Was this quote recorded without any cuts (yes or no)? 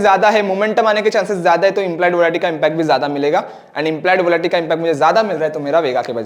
yes